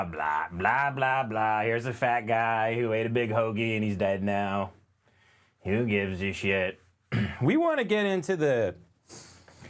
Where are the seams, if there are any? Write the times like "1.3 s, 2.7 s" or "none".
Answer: none